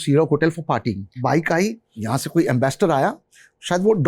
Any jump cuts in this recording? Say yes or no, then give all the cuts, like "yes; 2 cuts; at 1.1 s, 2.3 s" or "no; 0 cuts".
yes; 2 cuts; at 1.1 s, 1.9 s